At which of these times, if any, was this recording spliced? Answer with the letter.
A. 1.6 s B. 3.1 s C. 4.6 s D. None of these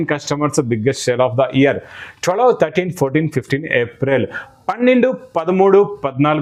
D